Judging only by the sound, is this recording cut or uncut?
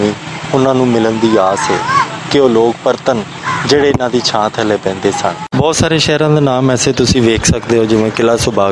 cut